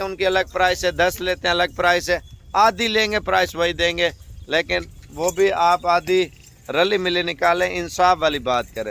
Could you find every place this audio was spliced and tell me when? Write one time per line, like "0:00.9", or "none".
none